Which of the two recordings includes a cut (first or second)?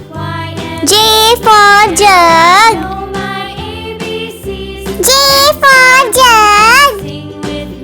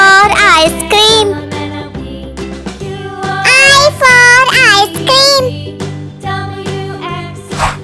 first